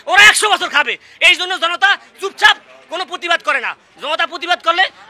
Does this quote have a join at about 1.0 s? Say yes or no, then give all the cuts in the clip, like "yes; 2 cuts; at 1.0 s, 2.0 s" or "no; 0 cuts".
no; 0 cuts